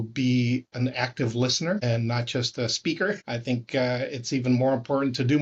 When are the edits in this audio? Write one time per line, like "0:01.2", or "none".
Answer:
0:01.8
0:03.2

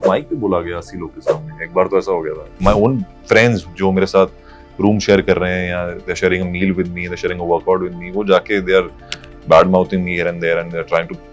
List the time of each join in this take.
0:02.6

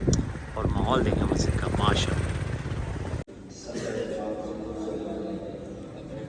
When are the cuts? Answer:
0:03.3

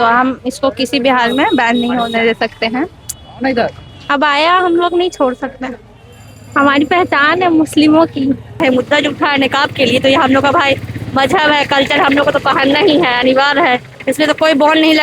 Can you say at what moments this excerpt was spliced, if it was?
0:04.0
0:08.6

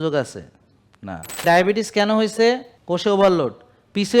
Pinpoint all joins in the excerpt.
0:01.4
0:02.7

